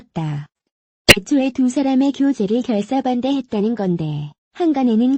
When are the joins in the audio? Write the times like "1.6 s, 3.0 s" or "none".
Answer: 4.0 s